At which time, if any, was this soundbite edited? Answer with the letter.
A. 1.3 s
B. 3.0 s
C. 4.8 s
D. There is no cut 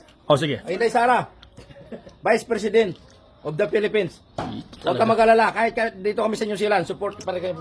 D